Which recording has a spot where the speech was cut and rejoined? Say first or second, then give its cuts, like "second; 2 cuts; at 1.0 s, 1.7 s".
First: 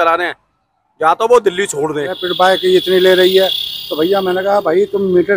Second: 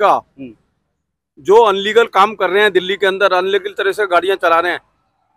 first; 1 cut; at 2.2 s